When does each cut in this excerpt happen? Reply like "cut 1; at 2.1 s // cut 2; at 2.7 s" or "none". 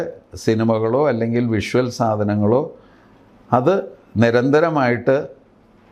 none